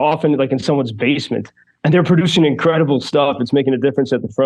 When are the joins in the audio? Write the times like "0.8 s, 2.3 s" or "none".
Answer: none